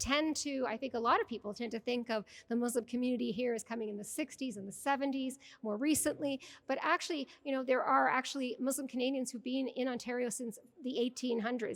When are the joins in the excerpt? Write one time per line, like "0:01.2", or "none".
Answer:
none